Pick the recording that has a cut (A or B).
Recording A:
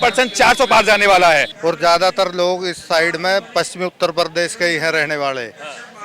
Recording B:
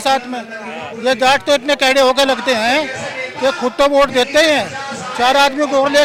A